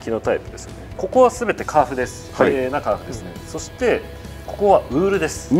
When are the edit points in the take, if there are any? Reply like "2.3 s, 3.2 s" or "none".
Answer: 1.0 s